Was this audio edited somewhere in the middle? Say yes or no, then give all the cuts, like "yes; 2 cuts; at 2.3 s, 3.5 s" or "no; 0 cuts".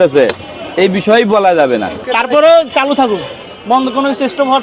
yes; 1 cut; at 1.9 s